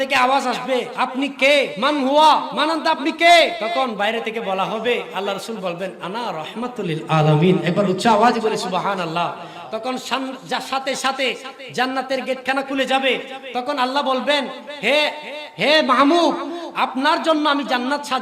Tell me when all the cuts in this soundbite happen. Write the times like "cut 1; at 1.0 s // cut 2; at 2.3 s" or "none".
cut 1; at 0.9 s // cut 2; at 1.7 s // cut 3; at 2.5 s // cut 4; at 3.6 s